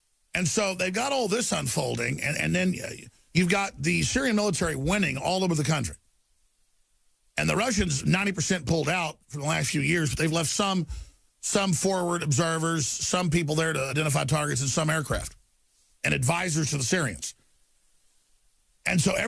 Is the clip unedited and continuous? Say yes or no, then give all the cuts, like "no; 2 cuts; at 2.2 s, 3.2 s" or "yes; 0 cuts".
no; 1 cut; at 0.9 s